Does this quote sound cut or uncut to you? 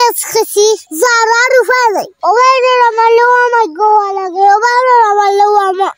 cut